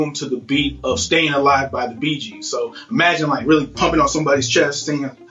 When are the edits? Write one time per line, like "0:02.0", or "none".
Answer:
none